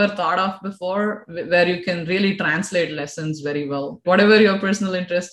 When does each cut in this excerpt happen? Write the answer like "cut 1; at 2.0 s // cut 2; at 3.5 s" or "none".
cut 1; at 4.0 s